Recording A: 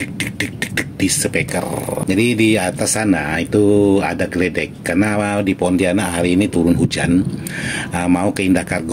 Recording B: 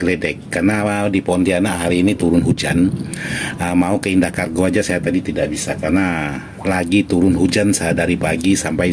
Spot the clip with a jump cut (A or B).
A